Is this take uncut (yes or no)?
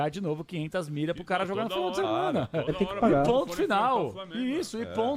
yes